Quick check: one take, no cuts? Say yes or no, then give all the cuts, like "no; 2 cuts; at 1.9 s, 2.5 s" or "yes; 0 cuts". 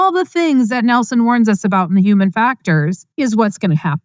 no; 1 cut; at 3.0 s